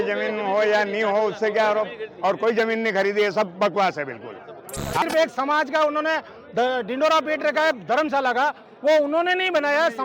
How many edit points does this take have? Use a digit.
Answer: 1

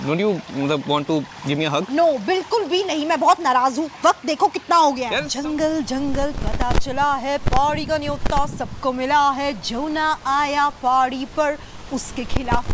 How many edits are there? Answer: 1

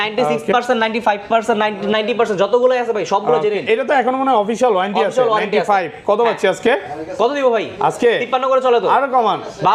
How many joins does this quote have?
0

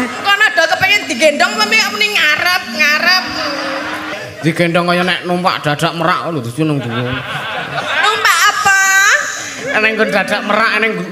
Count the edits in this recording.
2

